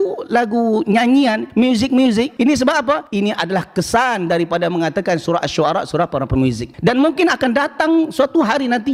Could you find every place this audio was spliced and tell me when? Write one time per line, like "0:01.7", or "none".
none